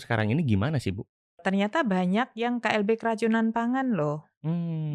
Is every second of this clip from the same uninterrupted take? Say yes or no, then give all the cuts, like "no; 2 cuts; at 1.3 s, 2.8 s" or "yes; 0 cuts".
no; 1 cut; at 1.4 s